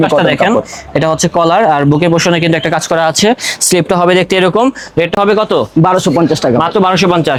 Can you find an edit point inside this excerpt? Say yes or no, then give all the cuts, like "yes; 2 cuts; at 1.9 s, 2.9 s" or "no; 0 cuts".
no; 0 cuts